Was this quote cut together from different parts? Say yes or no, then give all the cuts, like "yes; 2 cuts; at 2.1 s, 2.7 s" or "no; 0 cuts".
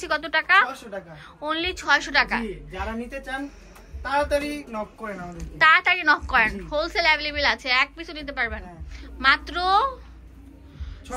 no; 0 cuts